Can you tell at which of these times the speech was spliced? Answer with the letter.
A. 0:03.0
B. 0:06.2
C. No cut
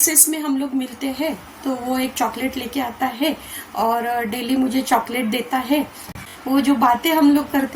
B